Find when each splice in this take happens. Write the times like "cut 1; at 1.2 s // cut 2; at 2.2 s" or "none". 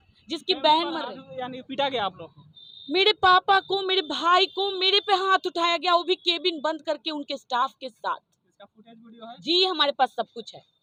none